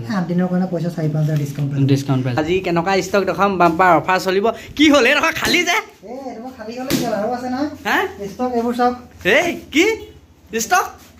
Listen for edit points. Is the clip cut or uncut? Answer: cut